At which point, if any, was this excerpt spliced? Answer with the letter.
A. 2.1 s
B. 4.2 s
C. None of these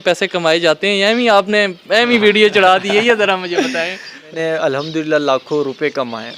B